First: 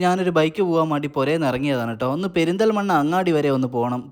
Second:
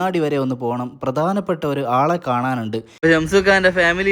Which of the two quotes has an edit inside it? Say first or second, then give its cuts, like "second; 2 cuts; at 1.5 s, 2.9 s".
second; 1 cut; at 3.0 s